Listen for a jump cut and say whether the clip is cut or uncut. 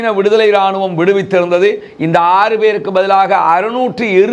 uncut